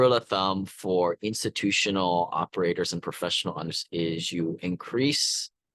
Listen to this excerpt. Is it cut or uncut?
cut